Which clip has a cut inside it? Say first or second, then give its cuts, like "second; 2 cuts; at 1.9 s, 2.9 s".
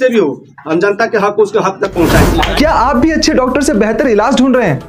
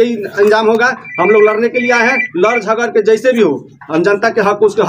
first; 1 cut; at 2.6 s